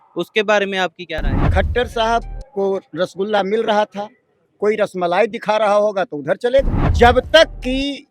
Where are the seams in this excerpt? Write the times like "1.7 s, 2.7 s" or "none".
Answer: 1.4 s, 6.8 s